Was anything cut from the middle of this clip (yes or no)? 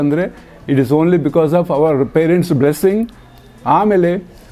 no